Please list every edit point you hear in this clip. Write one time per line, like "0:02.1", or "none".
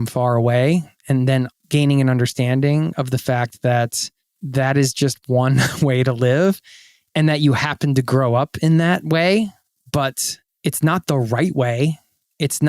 0:01.6